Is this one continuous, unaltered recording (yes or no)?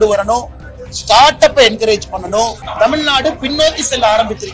no